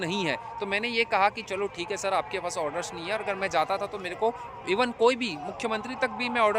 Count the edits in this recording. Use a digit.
0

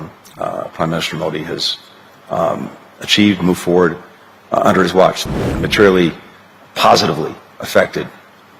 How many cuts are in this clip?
1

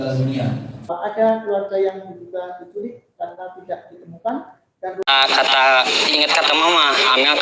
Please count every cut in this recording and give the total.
2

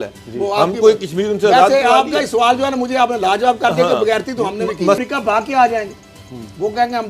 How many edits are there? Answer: 1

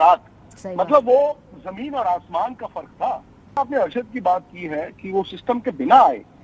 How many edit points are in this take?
1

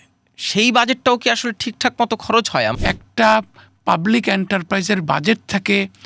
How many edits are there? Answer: 1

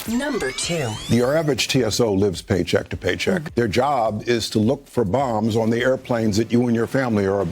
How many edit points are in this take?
1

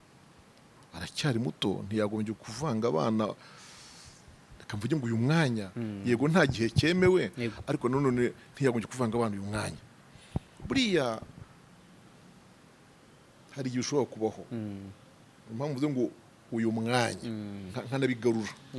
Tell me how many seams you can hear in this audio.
0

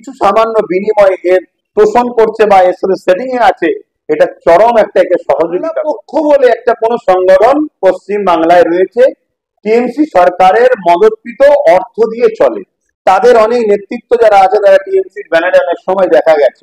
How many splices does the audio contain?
1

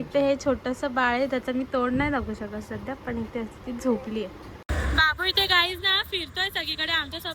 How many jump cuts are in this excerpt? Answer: 1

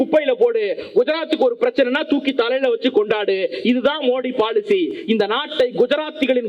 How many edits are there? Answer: 0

